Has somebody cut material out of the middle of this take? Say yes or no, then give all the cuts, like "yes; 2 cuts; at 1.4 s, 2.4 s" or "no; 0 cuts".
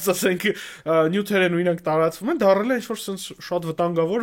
no; 0 cuts